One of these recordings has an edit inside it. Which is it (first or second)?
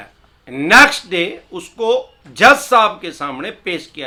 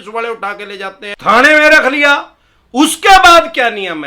second